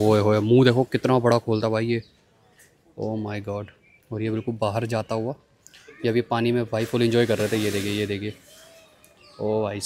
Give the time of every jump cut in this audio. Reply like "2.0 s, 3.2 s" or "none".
none

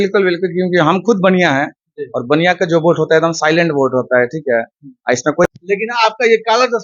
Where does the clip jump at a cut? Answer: 5.4 s

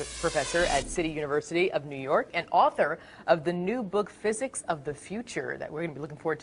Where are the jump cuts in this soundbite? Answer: none

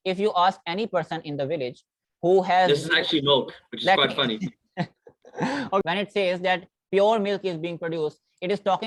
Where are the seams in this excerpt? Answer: 5.8 s

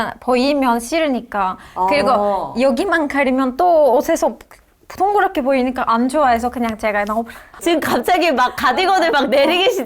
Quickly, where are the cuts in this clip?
7.6 s

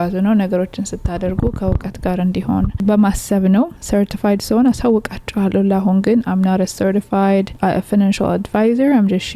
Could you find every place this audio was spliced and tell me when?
7.5 s

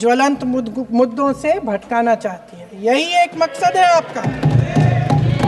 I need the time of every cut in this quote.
none

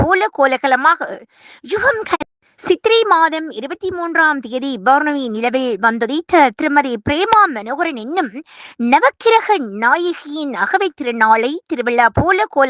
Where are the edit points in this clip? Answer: 2.2 s

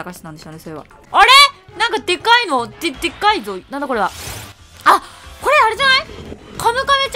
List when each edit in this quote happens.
0.9 s

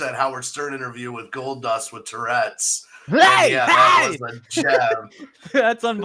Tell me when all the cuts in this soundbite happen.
none

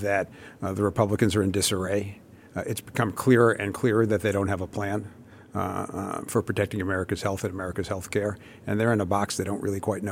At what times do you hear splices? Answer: none

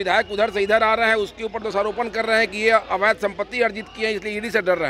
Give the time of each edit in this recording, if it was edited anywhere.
none

